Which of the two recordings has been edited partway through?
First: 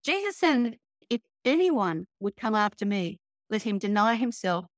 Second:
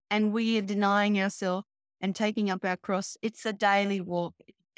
first; 1 cut; at 1.0 s

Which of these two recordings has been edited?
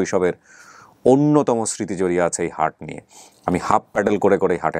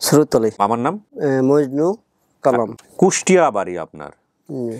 second; 2 cuts; at 0.7 s, 2.7 s

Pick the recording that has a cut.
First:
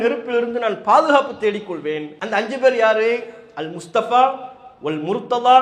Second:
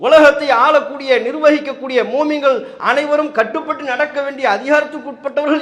first; 1 cut; at 2.1 s

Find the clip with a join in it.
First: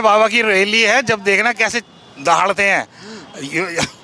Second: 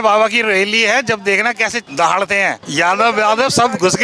second; 2 cuts; at 1.8 s, 2.6 s

